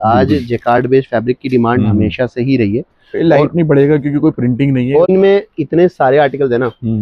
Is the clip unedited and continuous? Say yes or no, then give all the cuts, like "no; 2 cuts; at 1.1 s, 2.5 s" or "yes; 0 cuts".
no; 1 cut; at 5.1 s